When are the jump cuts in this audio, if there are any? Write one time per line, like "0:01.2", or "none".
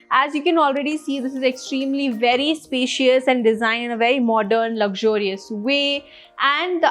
none